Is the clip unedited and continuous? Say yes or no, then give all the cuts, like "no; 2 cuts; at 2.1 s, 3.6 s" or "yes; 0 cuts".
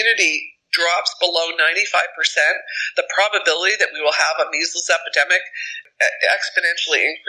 no; 1 cut; at 5.8 s